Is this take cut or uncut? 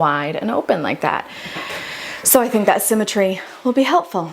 uncut